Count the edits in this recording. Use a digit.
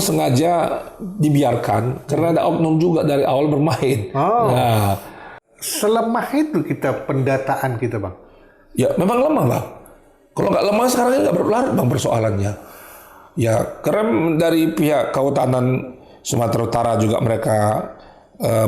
1